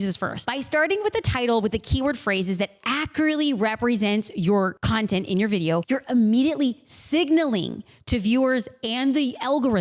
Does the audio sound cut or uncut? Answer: cut